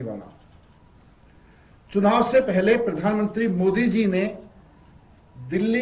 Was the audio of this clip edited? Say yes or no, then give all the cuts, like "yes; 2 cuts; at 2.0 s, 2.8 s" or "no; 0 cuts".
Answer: no; 0 cuts